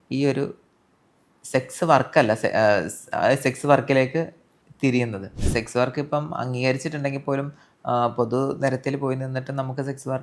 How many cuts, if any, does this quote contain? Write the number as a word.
one